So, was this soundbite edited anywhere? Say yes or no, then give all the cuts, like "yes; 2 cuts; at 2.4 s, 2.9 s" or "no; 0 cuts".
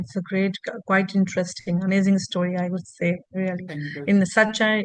no; 0 cuts